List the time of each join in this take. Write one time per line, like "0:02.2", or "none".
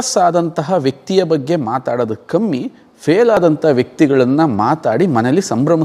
none

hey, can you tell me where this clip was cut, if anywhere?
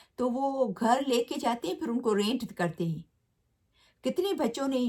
none

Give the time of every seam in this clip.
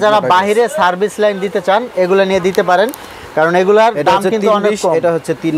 none

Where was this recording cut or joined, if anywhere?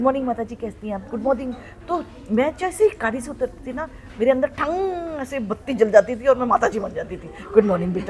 none

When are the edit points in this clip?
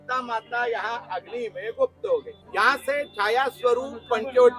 0:02.4

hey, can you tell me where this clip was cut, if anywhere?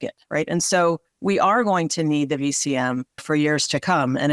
0:01.1
0:03.2

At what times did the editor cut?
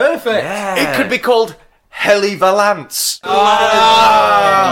0:03.3

